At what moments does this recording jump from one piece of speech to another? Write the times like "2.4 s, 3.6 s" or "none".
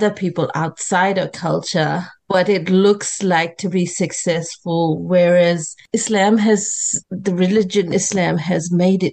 2.1 s, 5.8 s, 7.0 s